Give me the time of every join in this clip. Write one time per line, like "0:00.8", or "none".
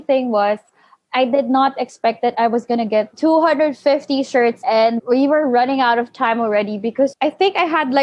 0:03.1
0:04.7
0:07.1